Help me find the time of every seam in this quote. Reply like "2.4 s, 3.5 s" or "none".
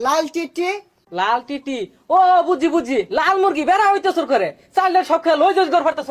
0.9 s